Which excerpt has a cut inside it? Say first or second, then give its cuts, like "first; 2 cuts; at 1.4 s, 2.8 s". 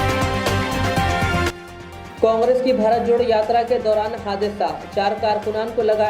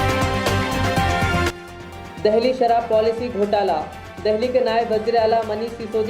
first; 1 cut; at 1.7 s